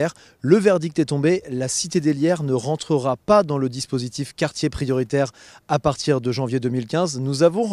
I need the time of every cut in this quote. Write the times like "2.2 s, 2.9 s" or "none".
4.0 s